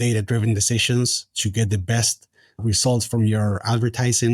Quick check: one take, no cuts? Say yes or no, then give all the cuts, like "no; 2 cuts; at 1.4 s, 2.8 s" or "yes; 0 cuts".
no; 1 cut; at 2.6 s